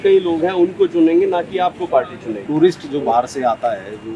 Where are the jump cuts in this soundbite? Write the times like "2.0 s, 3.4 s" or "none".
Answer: 2.4 s